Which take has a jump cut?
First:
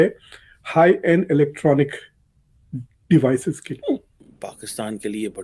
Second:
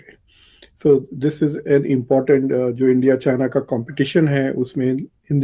first; 1 cut; at 4.1 s

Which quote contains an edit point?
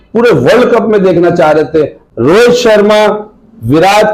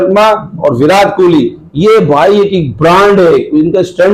first; 1 cut; at 2.0 s

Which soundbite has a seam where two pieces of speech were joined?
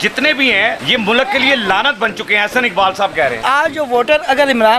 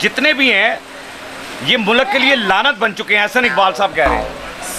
first; 2 cuts; at 0.8 s, 3.4 s

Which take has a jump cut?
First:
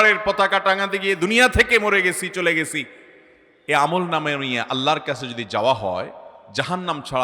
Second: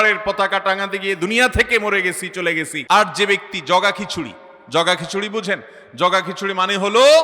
second; 1 cut; at 2.8 s

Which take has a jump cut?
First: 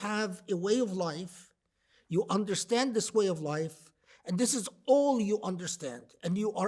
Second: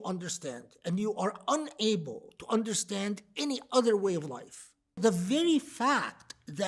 second; 1 cut; at 5.0 s

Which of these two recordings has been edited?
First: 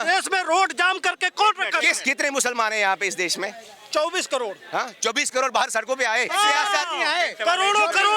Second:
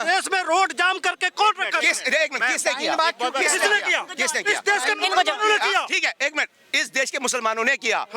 first; 2 cuts; at 2.0 s, 6.3 s

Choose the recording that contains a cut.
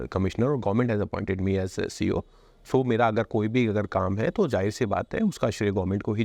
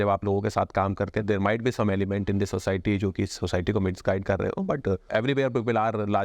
second; 2 cuts; at 1.2 s, 5.1 s

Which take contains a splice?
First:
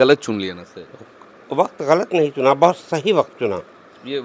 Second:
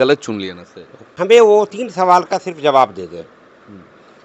second; 1 cut; at 1.3 s

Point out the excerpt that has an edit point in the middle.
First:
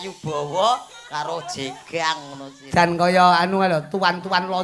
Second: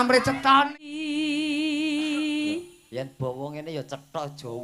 second; 1 cut; at 0.9 s

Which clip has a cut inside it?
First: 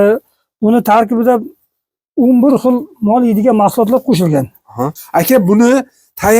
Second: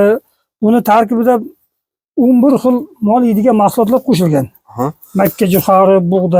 first; 1 cut; at 5.0 s

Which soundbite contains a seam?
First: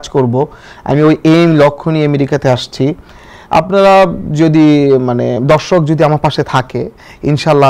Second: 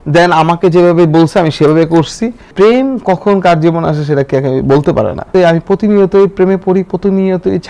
second; 2 cuts; at 2.5 s, 5.3 s

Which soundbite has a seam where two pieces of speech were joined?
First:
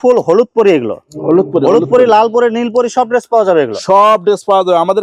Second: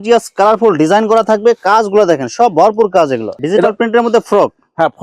second; 1 cut; at 3.3 s

